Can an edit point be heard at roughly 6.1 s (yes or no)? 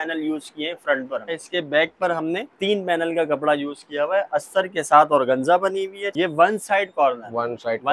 yes